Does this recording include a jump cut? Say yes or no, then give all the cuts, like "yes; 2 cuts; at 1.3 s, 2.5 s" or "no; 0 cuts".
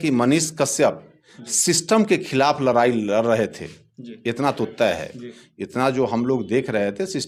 no; 0 cuts